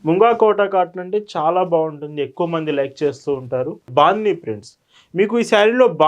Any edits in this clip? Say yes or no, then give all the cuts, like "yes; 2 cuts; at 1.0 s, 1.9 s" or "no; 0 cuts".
yes; 1 cut; at 3.8 s